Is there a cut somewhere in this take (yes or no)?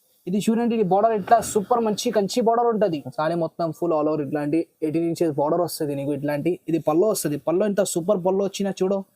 yes